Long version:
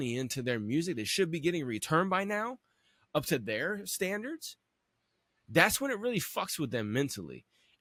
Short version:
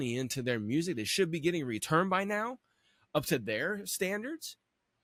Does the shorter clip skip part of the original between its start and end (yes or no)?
no